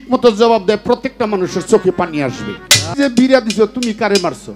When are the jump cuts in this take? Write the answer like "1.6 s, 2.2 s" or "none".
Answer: 2.9 s

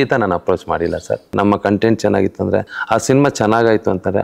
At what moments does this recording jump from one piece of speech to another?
1.3 s, 2.8 s

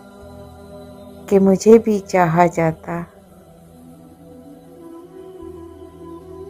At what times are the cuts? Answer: none

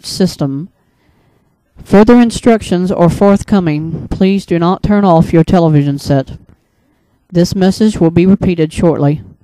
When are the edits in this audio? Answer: none

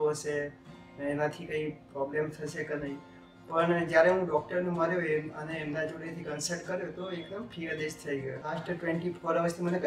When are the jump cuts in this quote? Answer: 8.6 s

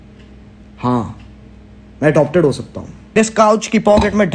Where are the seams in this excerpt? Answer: 3.2 s

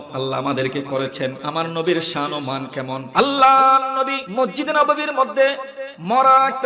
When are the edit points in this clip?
1.4 s, 3.1 s, 4.2 s

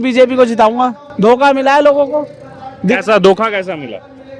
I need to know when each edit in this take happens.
1.0 s

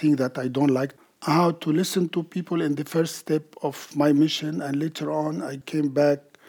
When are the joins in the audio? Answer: 1.0 s, 5.6 s

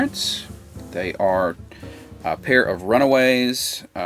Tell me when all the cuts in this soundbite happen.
none

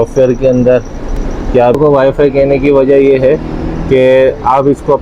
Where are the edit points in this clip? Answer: 1.8 s

